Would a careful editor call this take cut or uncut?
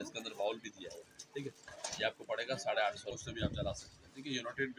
cut